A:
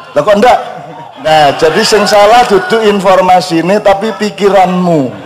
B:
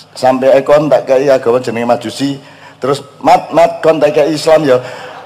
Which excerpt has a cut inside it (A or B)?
A